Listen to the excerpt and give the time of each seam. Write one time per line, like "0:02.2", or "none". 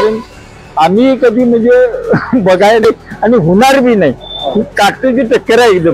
none

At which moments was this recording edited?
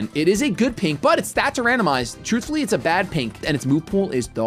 0:02.2
0:03.4

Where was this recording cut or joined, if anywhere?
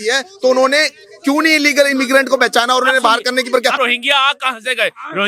0:03.8

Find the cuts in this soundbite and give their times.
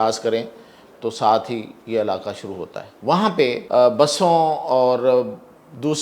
0:02.9
0:03.6

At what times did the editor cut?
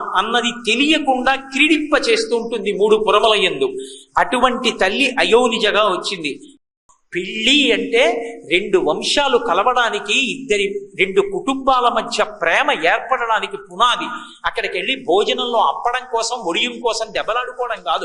0:06.7

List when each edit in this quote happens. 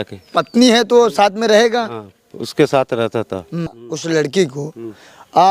0:03.7

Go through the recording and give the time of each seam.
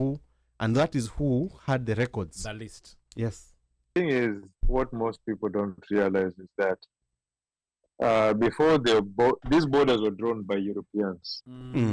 0:04.0

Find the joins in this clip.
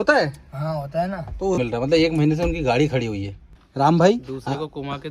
0:01.6
0:03.6

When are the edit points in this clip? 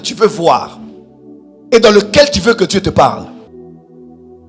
0:03.5

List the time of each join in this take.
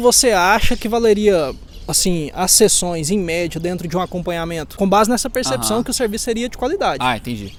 none

